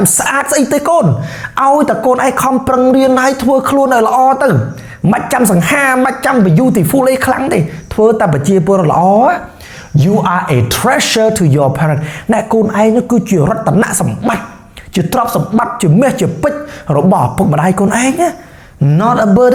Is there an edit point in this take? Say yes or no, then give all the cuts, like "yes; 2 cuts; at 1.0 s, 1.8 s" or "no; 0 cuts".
no; 0 cuts